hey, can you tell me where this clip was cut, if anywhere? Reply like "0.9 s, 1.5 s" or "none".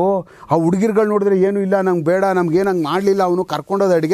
none